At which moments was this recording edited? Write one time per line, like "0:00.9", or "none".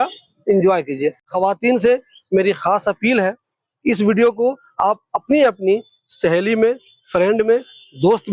0:01.3